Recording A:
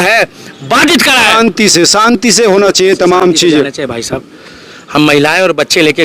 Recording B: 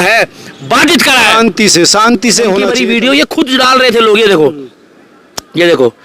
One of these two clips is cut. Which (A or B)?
B